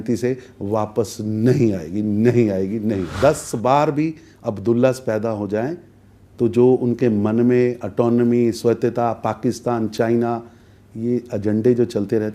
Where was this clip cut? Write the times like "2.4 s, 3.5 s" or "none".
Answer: 3.1 s